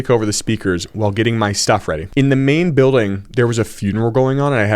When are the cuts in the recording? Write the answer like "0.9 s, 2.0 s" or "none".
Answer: 2.1 s